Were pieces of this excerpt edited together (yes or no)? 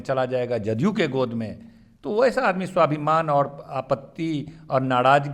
no